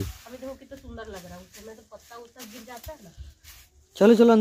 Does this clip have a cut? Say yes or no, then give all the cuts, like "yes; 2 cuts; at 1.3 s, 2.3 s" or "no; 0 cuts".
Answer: no; 0 cuts